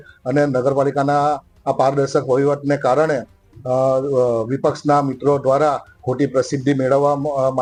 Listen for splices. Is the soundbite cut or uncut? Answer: uncut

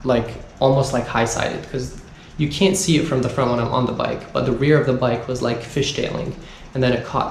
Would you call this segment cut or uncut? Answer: uncut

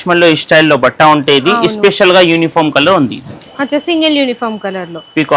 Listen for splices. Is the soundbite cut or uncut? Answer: uncut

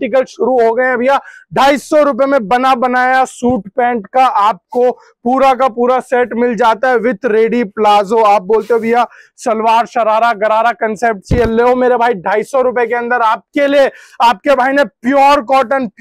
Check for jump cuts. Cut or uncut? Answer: uncut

